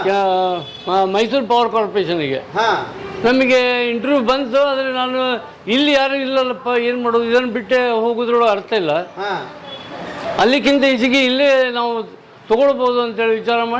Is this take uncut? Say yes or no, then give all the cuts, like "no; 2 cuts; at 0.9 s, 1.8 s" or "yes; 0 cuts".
yes; 0 cuts